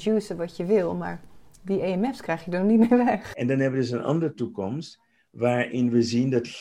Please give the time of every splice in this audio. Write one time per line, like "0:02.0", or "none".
0:03.3